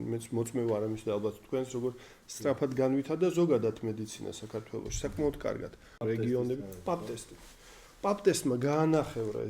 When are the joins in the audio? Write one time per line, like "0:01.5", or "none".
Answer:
0:06.0

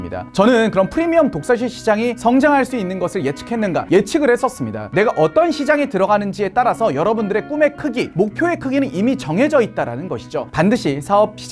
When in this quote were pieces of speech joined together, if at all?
0:04.7
0:10.5

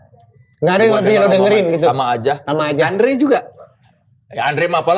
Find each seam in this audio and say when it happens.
none

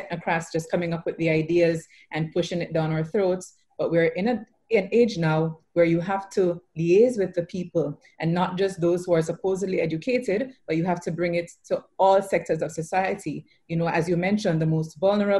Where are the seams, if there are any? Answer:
none

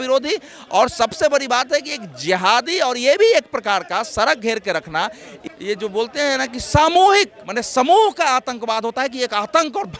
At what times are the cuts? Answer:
0:05.3

